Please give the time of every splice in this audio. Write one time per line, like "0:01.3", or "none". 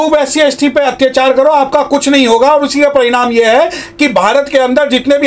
none